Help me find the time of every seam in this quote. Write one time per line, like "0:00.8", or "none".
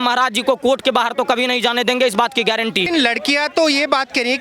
0:02.9